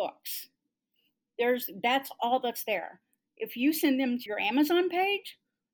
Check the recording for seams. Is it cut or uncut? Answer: cut